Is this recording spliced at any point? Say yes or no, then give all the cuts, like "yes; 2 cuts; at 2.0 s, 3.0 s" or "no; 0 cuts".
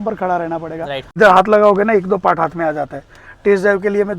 yes; 1 cut; at 1.1 s